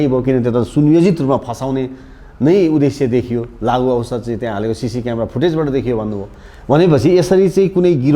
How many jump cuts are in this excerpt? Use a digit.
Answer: 0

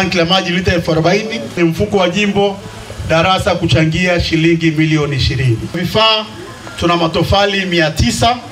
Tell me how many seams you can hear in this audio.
2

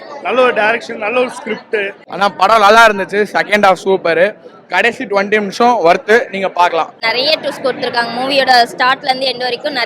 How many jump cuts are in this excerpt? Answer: 2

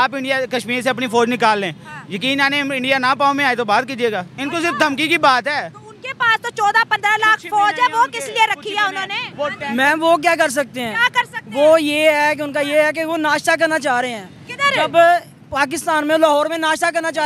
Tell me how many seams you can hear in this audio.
0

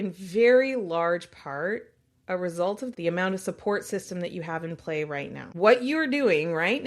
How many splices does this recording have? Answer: 2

